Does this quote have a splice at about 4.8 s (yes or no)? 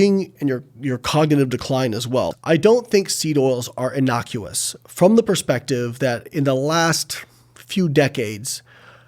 no